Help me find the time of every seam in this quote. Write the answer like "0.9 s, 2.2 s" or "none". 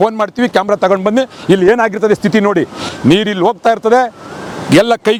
none